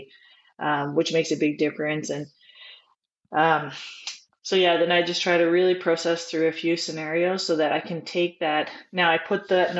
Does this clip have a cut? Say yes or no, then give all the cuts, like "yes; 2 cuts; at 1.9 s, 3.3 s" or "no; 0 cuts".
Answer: no; 0 cuts